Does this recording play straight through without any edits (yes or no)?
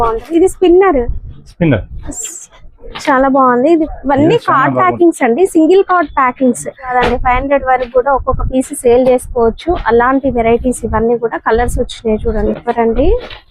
no